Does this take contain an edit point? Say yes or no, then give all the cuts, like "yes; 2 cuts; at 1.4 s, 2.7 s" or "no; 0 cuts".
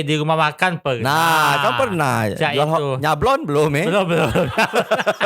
no; 0 cuts